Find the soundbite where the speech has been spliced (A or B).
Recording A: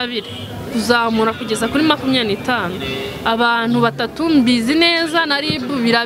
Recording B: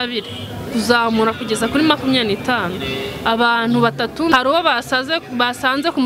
B